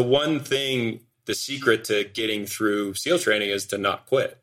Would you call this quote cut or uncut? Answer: cut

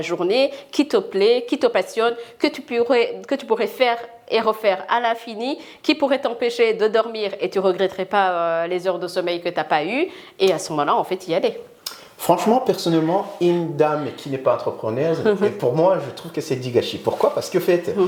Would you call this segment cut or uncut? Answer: uncut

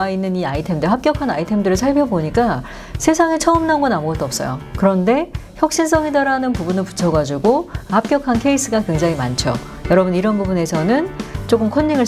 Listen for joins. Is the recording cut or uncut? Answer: uncut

